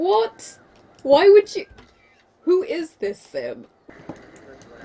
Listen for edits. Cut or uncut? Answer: cut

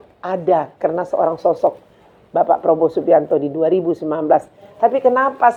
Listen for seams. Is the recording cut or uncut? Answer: uncut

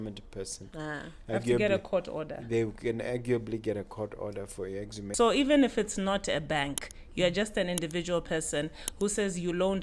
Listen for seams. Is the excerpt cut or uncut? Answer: cut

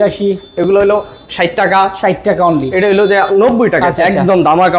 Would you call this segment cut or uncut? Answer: cut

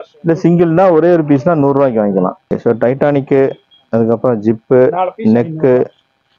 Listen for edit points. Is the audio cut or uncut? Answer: cut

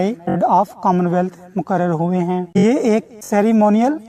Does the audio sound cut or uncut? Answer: uncut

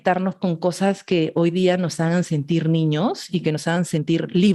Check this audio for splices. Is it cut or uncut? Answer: uncut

